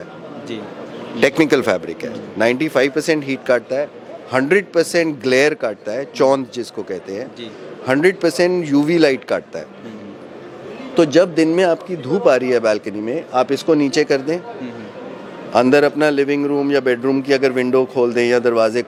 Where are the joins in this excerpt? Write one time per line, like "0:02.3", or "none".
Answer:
none